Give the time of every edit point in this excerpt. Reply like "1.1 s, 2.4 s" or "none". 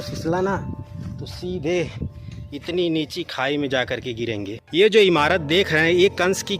4.6 s